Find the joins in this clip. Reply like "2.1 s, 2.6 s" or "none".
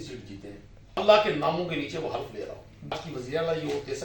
1.0 s, 3.0 s